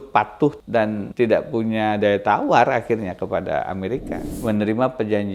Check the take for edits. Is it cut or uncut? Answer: cut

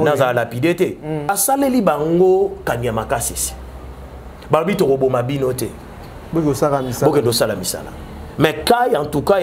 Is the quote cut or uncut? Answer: cut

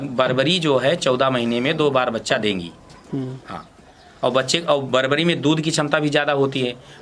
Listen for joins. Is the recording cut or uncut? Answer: uncut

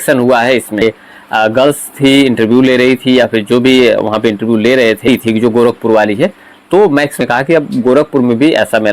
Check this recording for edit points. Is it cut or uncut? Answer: cut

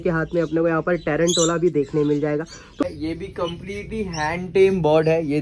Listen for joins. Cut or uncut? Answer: cut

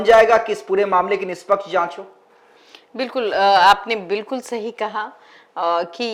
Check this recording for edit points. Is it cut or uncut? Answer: uncut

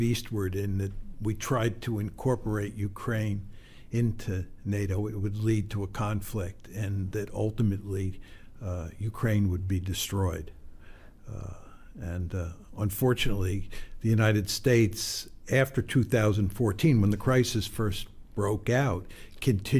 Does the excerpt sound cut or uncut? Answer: uncut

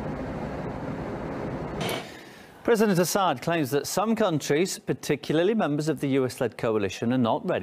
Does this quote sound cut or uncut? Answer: uncut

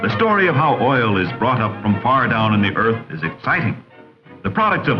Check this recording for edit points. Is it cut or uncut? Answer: uncut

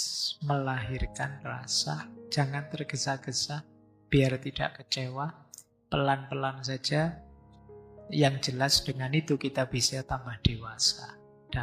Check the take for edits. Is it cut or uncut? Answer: uncut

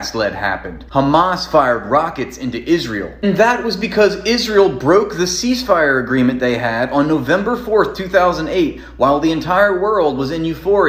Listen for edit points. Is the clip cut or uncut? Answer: uncut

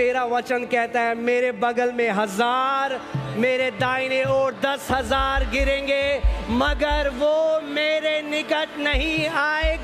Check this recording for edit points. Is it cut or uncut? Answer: uncut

